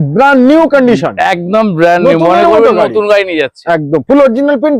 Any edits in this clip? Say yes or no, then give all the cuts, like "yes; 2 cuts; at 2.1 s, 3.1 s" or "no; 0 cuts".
no; 0 cuts